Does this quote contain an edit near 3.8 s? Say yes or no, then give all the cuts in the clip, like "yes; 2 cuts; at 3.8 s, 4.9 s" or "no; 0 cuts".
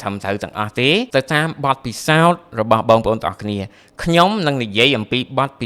no; 1 cut; at 1.1 s